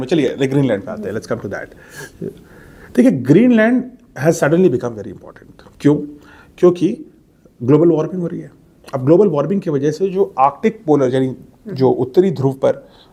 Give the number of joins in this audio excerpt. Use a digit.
0